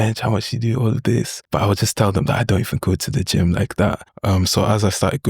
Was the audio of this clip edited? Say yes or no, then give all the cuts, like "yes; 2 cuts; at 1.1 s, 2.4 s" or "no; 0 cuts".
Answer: yes; 2 cuts; at 1.4 s, 4.1 s